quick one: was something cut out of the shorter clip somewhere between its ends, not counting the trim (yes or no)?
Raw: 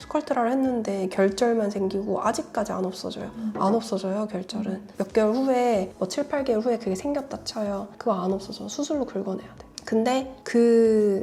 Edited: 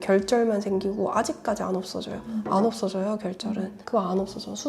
yes